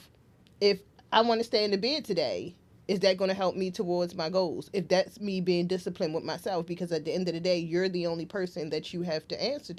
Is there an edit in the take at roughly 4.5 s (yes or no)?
no